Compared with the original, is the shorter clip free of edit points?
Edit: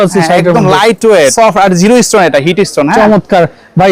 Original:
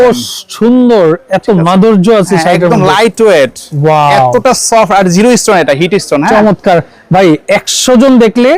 no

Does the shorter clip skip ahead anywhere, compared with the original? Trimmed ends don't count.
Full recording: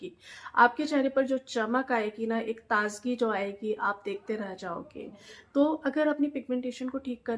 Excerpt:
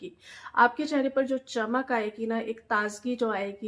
no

